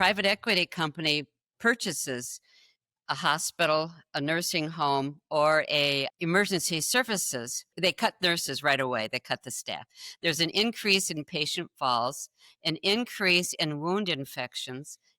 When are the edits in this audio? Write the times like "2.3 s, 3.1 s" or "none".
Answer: 6.1 s, 7.7 s